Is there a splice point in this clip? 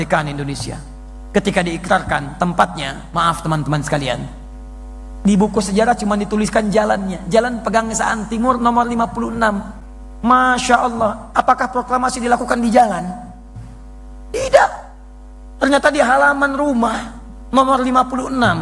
no; 0 cuts

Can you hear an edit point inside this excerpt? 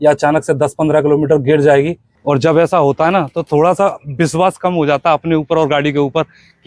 no; 0 cuts

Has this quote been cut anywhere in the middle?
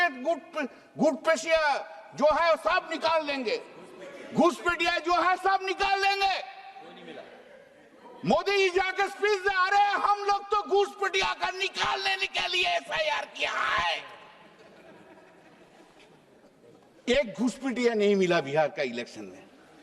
no; 0 cuts

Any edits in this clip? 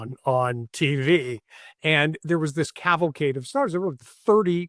no; 0 cuts

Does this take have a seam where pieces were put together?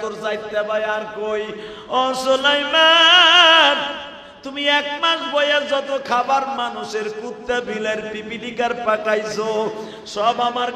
no; 0 cuts

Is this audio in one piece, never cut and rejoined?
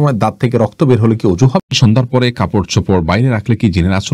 no; 1 cut; at 1.7 s

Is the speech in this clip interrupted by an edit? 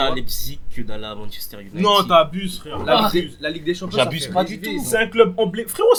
no; 0 cuts

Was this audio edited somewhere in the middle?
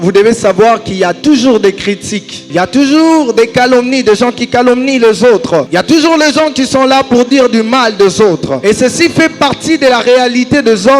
yes; 3 cuts; at 2.4 s, 5.7 s, 8.6 s

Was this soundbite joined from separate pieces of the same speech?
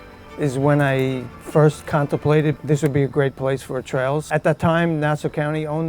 yes; 1 cut; at 4.3 s

